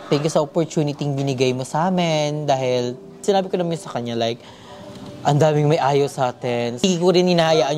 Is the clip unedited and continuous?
no; 2 cuts; at 3.2 s, 6.8 s

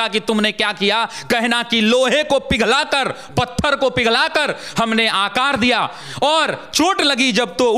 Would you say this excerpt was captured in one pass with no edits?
yes; 0 cuts

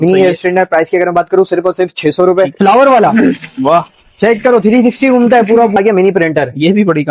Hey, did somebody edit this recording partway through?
yes; 2 cuts; at 2.5 s, 5.8 s

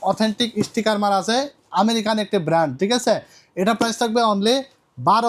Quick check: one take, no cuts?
yes; 0 cuts

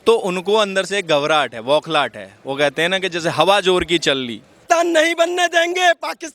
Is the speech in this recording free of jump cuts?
no; 1 cut; at 4.6 s

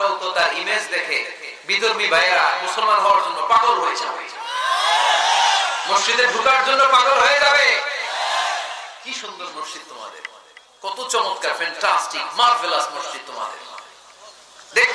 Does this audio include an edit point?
no; 0 cuts

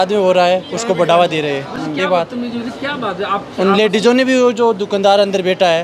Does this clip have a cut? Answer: no; 0 cuts

